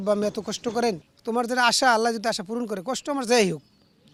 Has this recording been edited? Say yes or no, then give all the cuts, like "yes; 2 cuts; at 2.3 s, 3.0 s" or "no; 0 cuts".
no; 0 cuts